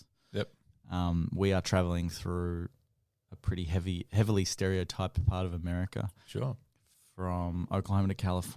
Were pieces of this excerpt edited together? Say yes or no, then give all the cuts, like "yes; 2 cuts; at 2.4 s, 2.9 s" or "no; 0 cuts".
no; 0 cuts